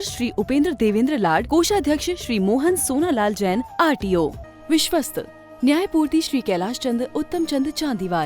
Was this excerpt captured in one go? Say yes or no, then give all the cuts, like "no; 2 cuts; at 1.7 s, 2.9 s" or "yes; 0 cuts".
no; 1 cut; at 4.4 s